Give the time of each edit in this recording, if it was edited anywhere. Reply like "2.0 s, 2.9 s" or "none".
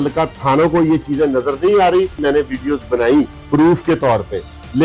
2.2 s, 3.4 s